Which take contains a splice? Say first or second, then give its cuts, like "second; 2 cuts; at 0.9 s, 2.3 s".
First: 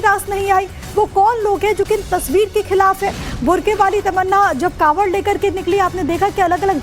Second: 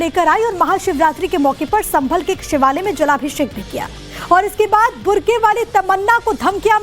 second; 1 cut; at 1.6 s